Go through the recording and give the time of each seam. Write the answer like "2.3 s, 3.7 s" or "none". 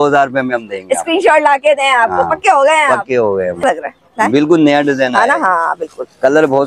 3.6 s